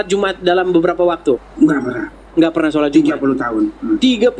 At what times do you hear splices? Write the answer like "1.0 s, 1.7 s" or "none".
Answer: 1.5 s